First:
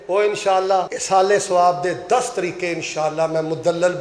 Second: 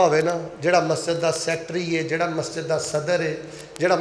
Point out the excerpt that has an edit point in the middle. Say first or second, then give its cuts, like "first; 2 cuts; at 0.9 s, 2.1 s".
first; 1 cut; at 1.0 s